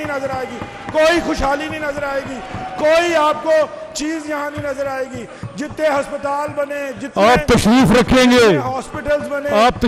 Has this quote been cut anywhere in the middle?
no; 0 cuts

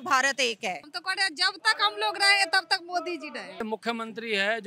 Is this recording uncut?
no; 2 cuts; at 0.9 s, 3.6 s

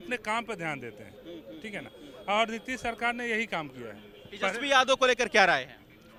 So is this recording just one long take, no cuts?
yes; 0 cuts

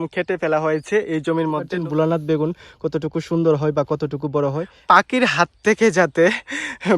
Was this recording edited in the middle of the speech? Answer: yes; 2 cuts; at 1.7 s, 4.7 s

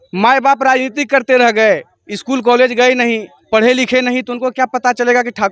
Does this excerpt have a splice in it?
no; 0 cuts

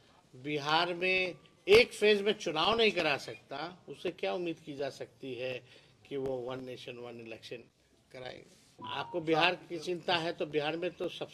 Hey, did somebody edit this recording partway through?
yes; 1 cut; at 8.8 s

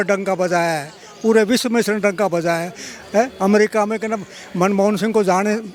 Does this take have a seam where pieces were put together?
no; 0 cuts

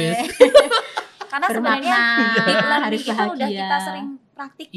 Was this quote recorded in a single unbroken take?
yes; 0 cuts

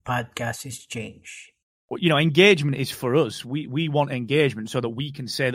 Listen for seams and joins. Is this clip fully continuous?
no; 1 cut; at 1.6 s

